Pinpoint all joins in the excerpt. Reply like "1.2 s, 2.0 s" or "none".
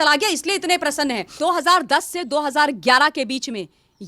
1.3 s